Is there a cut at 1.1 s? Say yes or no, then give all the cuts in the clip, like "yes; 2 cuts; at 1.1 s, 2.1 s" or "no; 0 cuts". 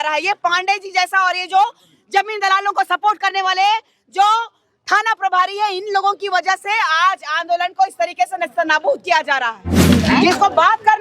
no; 1 cut; at 9.9 s